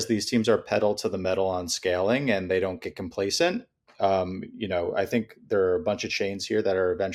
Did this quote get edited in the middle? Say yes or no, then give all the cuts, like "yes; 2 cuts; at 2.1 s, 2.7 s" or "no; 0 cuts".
no; 0 cuts